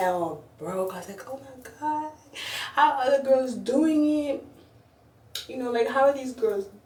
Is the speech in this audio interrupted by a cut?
no; 0 cuts

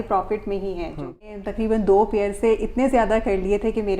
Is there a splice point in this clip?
yes; 1 cut; at 1.2 s

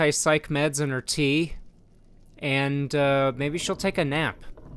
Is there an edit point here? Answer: no; 0 cuts

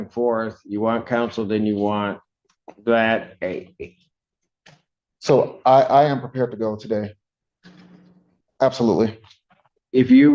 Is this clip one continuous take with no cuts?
no; 1 cut; at 8.4 s

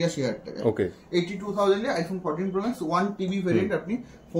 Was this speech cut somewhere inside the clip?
no; 0 cuts

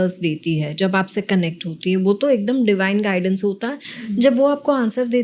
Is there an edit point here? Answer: no; 0 cuts

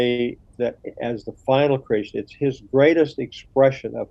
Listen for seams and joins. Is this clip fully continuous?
yes; 0 cuts

